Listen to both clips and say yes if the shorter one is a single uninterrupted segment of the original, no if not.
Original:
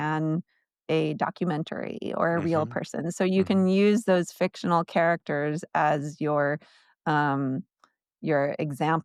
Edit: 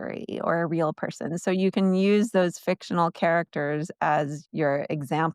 no